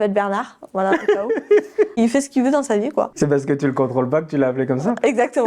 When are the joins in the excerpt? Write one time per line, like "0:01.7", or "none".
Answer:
0:01.9
0:03.1